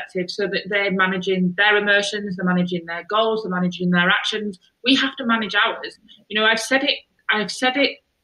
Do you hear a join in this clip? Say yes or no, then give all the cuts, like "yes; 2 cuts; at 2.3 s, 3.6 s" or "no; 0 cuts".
no; 0 cuts